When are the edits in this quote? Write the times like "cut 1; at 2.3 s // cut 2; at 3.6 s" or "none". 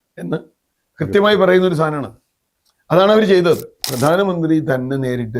cut 1; at 3.8 s